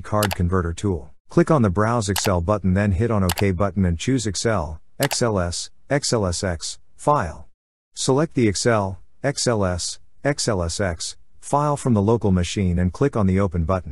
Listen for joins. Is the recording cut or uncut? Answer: cut